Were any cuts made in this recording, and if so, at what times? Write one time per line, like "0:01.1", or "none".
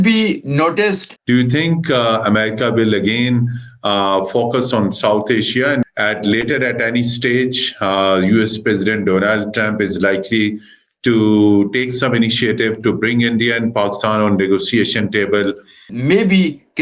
0:01.1
0:05.8
0:15.9